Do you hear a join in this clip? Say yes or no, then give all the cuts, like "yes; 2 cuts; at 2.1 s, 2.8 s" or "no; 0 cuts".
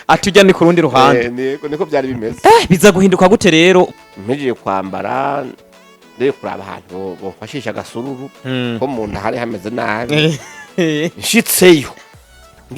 yes; 1 cut; at 3.9 s